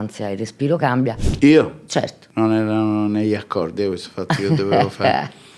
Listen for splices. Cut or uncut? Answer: cut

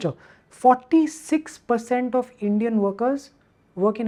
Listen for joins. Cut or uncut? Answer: uncut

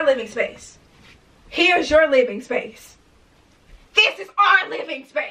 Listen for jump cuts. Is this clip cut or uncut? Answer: uncut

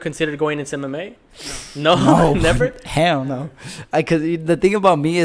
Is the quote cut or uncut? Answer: uncut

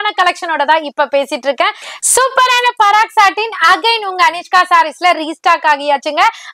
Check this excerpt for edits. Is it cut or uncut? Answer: cut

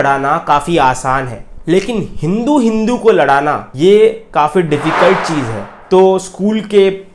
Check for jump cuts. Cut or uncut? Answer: cut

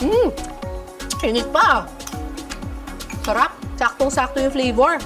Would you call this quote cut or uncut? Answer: cut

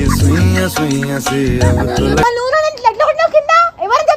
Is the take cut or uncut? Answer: cut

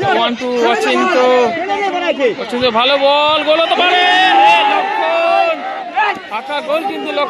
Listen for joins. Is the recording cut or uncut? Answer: uncut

